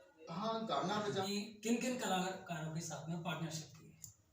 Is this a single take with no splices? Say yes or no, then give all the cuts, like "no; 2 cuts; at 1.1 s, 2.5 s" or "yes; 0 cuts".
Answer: no; 1 cut; at 1.3 s